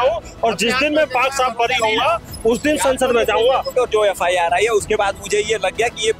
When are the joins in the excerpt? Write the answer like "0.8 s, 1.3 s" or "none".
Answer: 3.7 s